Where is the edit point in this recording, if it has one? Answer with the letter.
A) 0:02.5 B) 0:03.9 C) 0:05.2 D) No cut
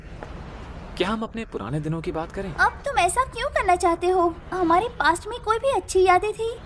A